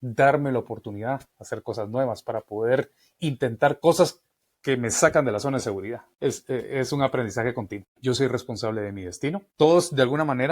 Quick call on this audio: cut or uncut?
cut